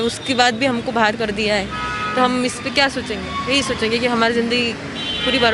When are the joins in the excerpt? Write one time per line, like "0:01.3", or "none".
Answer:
none